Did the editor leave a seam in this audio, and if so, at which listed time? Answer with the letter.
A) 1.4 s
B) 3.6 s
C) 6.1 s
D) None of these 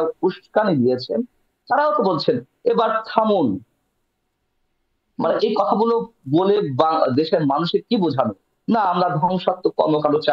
D